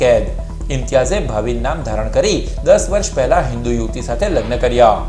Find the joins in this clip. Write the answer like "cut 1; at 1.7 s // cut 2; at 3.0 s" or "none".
none